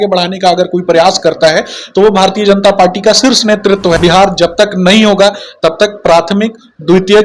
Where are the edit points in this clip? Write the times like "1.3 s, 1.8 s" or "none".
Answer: 4.0 s